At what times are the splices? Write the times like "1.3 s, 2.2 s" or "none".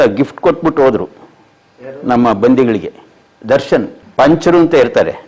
4.0 s

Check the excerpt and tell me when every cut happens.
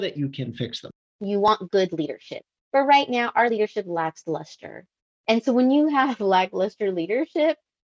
1.1 s

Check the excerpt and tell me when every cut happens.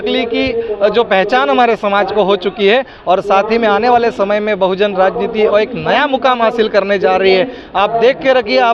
none

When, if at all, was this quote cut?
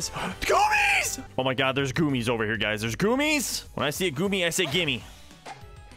1.1 s, 3.6 s

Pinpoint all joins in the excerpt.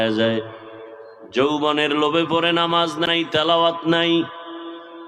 3.1 s

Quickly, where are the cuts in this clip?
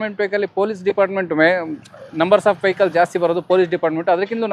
none

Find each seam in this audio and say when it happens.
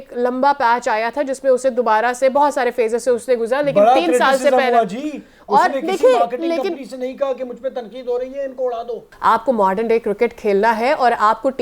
9.0 s

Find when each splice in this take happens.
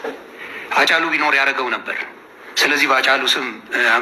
2.5 s

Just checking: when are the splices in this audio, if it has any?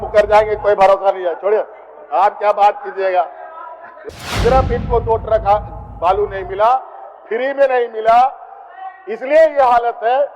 4.0 s

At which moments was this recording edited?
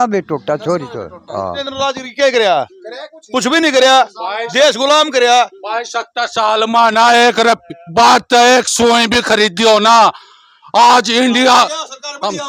1.6 s

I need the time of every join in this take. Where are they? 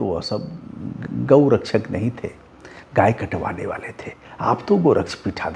none

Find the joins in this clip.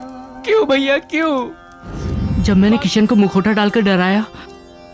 2.1 s

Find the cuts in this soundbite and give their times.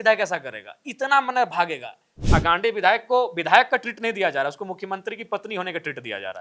2.1 s

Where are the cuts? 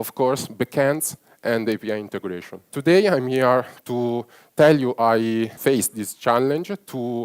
2.7 s, 5.5 s

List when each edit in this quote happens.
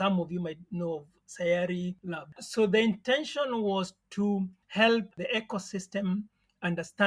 2.4 s

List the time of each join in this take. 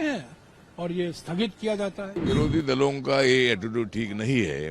2.1 s

